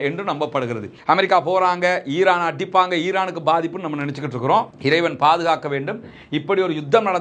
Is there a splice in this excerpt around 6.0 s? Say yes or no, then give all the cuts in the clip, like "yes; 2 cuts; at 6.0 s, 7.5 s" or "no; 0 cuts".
no; 1 cut; at 0.9 s